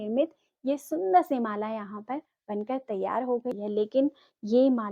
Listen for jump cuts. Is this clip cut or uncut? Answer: cut